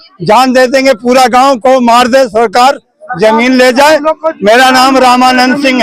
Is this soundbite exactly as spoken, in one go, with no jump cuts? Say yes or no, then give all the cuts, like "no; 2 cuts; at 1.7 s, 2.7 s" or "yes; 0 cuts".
yes; 0 cuts